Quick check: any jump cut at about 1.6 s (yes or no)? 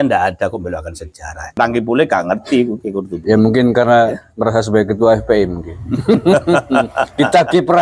yes